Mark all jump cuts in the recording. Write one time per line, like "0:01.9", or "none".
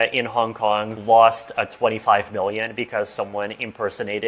0:00.9